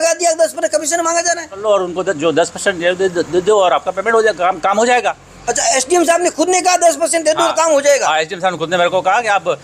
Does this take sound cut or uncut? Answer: cut